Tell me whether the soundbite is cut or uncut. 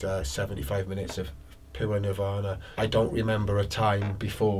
cut